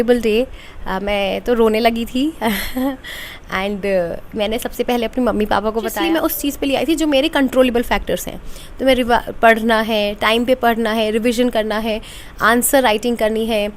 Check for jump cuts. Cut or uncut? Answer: cut